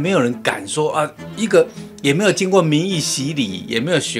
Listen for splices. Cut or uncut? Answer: uncut